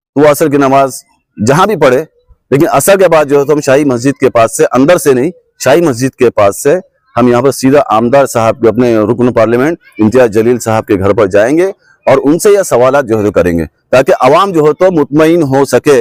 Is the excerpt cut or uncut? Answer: uncut